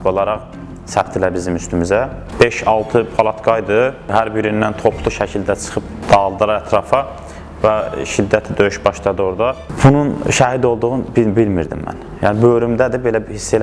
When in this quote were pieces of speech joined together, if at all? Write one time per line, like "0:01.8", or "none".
0:02.2
0:04.1
0:06.0
0:09.7